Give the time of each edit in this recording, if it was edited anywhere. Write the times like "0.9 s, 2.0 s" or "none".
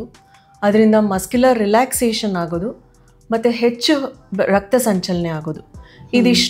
none